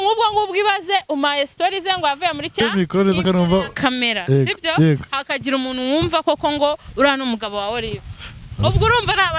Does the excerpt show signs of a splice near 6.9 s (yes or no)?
no